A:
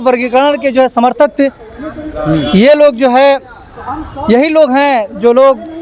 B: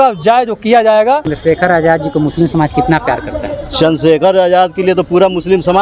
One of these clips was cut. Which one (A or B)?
B